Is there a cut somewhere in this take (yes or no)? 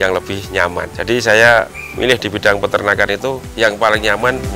yes